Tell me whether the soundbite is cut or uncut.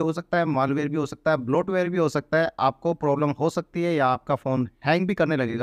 uncut